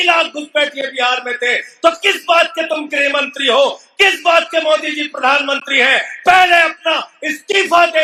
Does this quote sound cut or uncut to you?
uncut